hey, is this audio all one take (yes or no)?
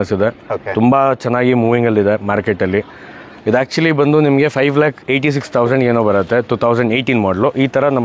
yes